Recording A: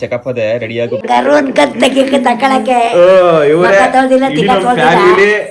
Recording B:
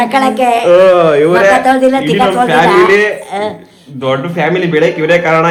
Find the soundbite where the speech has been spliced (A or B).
A